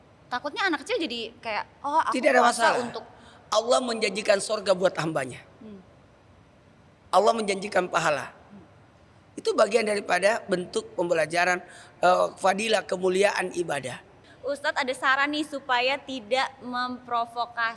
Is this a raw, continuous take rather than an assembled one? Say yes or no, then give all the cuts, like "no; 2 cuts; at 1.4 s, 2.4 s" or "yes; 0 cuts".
no; 1 cut; at 14.2 s